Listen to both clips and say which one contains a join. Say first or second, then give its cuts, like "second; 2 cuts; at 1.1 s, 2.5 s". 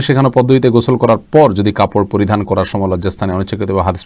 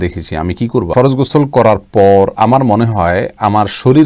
second; 1 cut; at 0.9 s